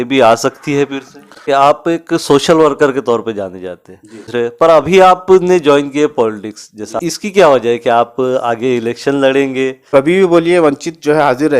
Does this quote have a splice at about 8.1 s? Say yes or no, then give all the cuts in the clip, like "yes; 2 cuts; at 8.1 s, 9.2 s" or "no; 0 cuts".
no; 4 cuts; at 1.4 s, 4.2 s, 6.9 s, 9.9 s